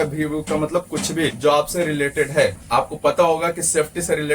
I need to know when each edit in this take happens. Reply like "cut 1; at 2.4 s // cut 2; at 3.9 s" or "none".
cut 1; at 1.4 s // cut 2; at 2.6 s